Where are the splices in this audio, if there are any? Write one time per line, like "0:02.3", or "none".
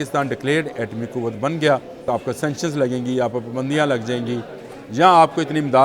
0:02.0